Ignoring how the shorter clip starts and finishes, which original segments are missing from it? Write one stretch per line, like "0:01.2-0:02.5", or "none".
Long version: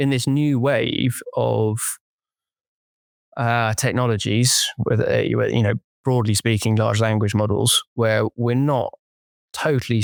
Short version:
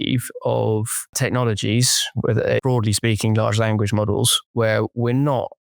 0:02.1-0:03.8
0:05.2-0:06.0